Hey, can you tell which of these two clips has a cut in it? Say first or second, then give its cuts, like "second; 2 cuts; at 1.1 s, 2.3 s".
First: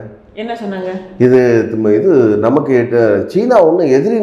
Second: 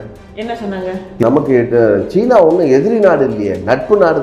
second; 1 cut; at 1.2 s